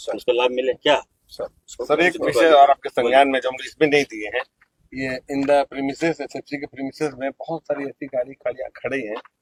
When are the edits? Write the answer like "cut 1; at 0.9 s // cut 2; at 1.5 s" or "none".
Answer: none